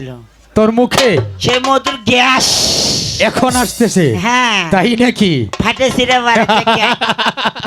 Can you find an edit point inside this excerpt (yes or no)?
no